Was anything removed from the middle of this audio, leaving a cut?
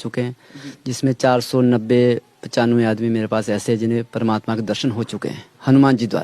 no; 0 cuts

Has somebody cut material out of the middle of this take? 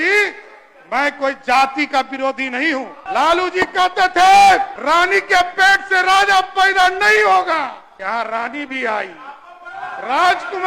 yes; 3 cuts; at 3.0 s, 4.8 s, 7.9 s

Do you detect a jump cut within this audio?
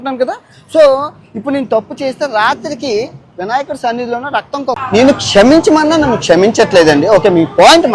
yes; 1 cut; at 4.8 s

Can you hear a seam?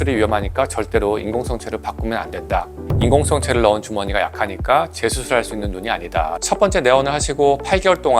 yes; 2 cuts; at 2.8 s, 6.4 s

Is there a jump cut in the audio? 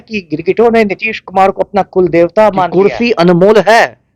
yes; 1 cut; at 2.7 s

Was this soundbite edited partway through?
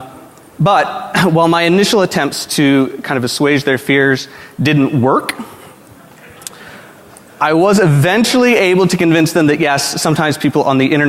yes; 1 cut; at 7.1 s

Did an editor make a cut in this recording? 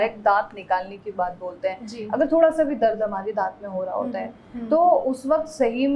no; 0 cuts

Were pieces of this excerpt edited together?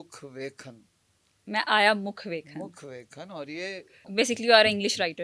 yes; 1 cut; at 4.0 s

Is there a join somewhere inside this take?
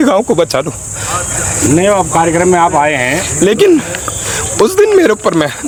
no; 0 cuts

